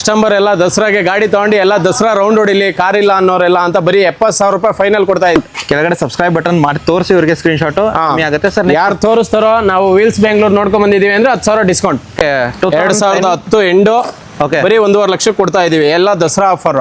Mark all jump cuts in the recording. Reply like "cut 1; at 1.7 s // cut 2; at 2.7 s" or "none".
cut 1; at 5.3 s // cut 2; at 12.1 s